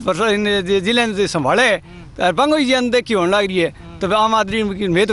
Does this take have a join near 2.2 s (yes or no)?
no